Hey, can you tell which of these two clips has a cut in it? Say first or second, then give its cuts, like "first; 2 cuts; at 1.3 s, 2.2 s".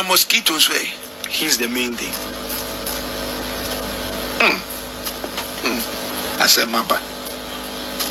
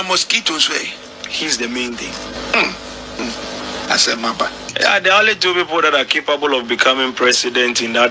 second; 3 cuts; at 2.4 s, 3.2 s, 4.7 s